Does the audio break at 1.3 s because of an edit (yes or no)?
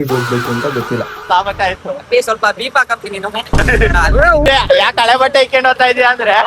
yes